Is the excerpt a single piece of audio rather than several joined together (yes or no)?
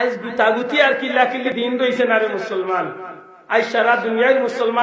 no